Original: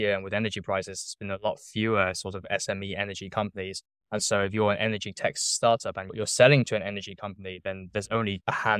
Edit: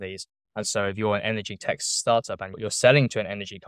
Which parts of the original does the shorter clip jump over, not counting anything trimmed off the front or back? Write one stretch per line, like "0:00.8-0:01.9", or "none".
none